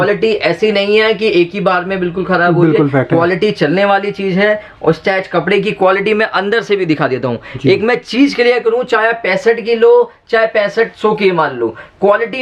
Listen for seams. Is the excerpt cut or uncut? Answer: uncut